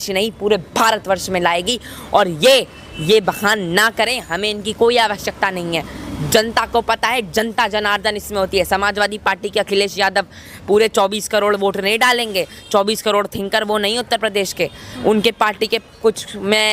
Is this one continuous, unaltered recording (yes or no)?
yes